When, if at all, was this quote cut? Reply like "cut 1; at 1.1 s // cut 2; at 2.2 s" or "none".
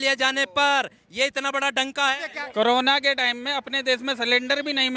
cut 1; at 2.3 s